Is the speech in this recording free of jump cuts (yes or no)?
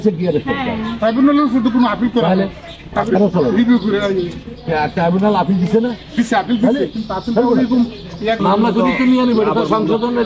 no